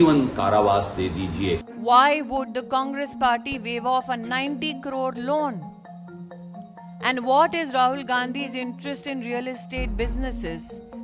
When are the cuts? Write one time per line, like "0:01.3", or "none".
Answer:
0:01.7